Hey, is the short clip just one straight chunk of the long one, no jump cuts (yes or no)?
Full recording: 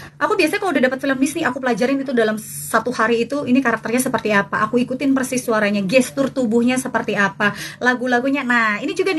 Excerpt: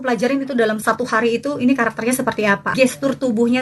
no